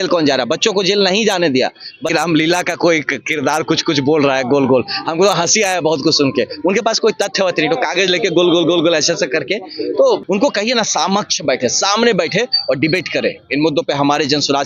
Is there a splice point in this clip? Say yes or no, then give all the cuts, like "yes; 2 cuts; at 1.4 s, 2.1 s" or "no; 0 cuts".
yes; 2 cuts; at 2.1 s, 10.2 s